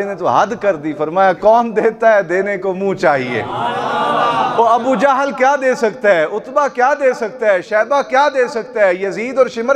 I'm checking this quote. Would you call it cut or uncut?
uncut